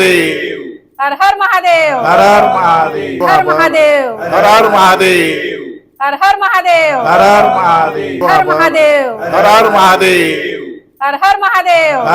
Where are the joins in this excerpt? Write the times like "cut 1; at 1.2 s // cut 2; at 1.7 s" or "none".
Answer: cut 1; at 3.2 s // cut 2; at 8.2 s